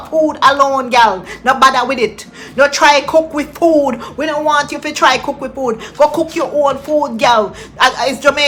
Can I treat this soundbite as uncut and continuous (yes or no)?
yes